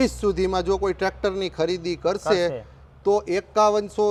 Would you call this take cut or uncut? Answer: uncut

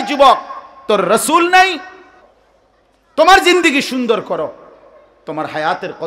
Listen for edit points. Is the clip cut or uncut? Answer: cut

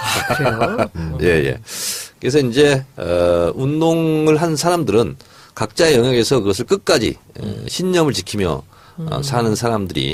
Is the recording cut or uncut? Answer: uncut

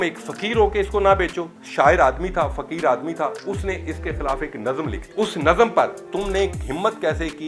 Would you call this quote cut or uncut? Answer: cut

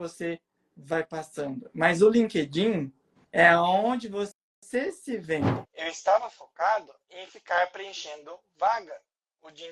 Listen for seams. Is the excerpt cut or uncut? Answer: cut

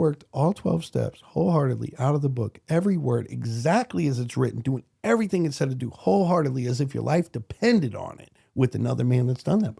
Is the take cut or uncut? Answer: uncut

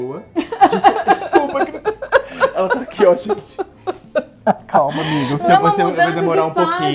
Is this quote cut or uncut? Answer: uncut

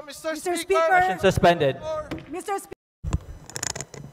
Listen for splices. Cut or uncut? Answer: cut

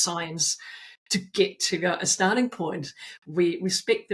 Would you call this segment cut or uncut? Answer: uncut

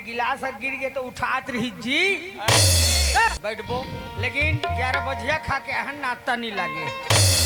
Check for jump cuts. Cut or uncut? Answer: cut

